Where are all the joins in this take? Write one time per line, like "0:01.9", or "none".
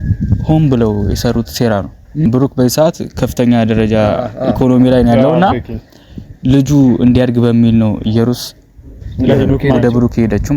0:02.3